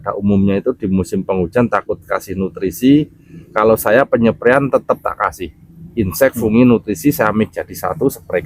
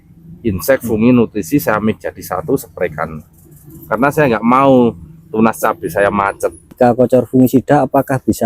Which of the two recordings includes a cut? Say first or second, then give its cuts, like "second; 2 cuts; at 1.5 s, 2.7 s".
second; 1 cut; at 6.7 s